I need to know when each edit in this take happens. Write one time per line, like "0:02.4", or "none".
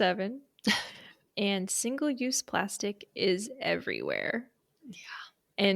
0:01.1